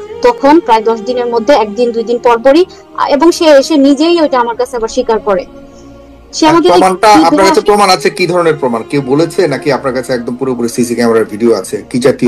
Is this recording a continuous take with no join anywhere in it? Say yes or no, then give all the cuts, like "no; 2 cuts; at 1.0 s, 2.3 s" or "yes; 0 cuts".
yes; 0 cuts